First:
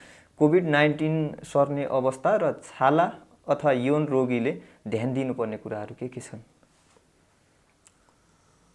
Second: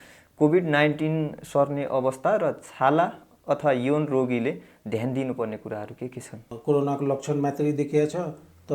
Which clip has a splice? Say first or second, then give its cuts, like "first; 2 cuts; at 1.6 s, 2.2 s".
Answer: second; 1 cut; at 6.5 s